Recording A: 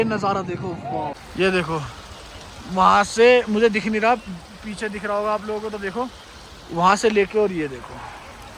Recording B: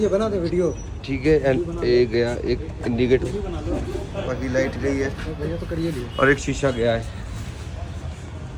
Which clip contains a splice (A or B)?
A